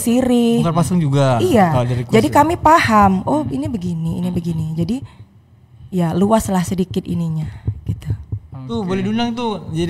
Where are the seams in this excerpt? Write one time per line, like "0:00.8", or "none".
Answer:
none